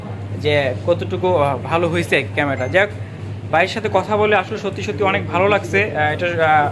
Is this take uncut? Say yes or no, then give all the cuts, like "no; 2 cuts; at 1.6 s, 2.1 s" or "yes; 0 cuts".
yes; 0 cuts